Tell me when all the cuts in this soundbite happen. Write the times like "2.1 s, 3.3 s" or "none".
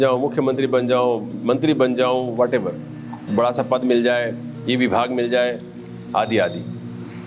none